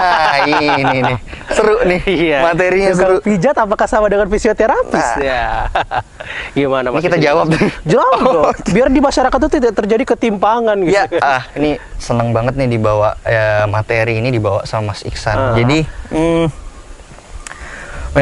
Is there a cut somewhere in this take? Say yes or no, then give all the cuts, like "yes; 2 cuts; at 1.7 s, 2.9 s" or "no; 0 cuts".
no; 0 cuts